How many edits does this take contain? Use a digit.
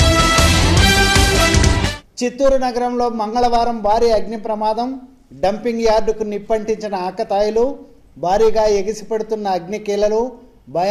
1